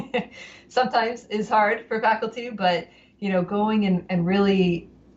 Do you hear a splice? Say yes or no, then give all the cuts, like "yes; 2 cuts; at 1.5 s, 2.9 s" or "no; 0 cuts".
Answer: no; 0 cuts